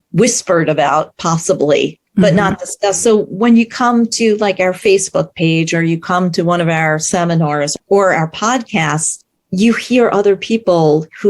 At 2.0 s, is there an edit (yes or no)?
yes